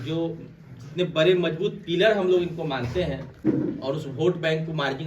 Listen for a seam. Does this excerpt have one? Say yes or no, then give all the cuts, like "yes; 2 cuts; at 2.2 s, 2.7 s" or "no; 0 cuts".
yes; 1 cut; at 3.4 s